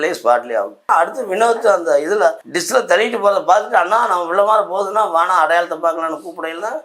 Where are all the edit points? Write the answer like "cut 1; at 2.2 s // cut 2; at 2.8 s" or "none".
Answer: cut 1; at 0.9 s // cut 2; at 2.5 s